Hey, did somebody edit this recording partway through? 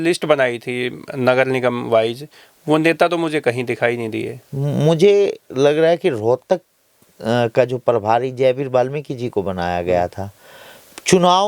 no; 0 cuts

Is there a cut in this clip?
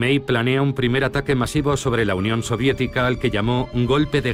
no; 0 cuts

